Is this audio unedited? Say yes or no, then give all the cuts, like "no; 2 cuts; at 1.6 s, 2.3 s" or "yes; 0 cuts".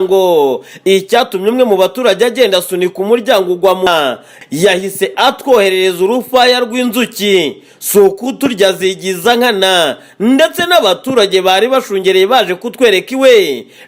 no; 1 cut; at 3.9 s